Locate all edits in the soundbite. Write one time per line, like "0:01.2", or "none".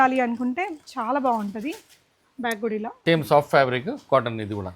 0:02.9

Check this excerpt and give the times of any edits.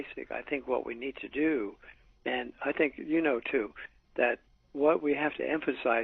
0:02.4

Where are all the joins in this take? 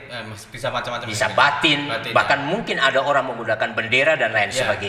none

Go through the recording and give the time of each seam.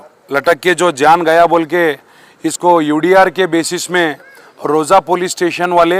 none

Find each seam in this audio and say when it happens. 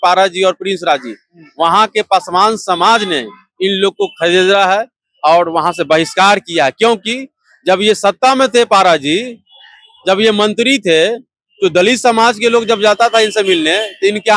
none

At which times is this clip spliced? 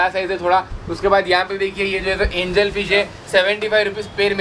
none

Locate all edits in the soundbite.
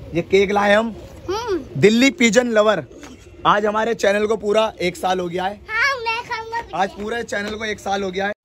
none

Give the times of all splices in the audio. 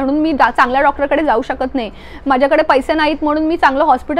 none

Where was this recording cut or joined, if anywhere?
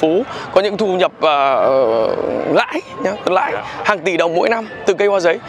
none

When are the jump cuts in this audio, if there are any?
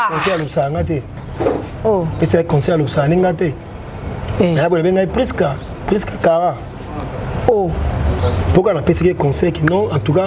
0:02.1

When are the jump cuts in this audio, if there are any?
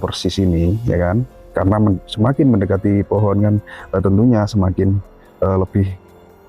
0:01.5

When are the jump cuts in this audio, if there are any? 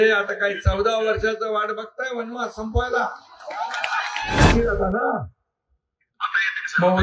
0:04.5

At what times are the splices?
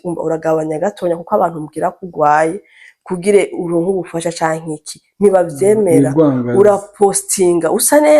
none

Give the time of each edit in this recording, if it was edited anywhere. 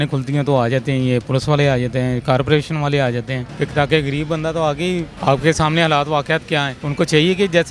0:03.4
0:05.1
0:06.8

